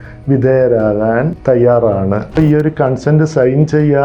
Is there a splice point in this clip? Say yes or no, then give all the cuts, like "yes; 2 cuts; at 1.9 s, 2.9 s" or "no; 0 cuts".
yes; 2 cuts; at 1.3 s, 2.4 s